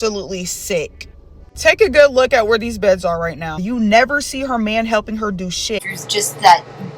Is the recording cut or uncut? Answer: cut